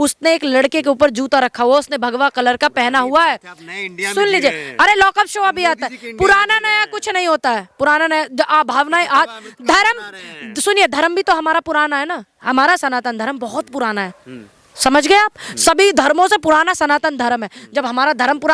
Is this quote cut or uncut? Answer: uncut